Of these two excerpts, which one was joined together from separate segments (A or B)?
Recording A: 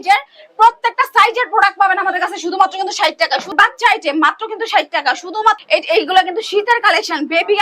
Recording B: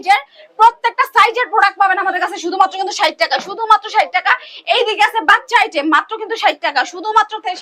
A